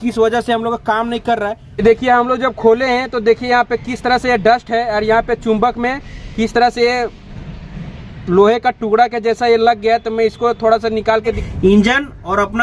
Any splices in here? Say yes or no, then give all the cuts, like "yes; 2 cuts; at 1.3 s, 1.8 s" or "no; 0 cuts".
yes; 2 cuts; at 1.8 s, 11.4 s